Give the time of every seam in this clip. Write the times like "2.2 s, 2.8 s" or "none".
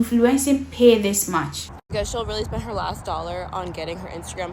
1.5 s